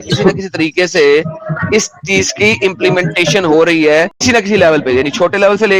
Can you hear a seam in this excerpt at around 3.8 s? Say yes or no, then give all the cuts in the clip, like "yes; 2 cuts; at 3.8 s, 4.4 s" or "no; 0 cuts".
no; 0 cuts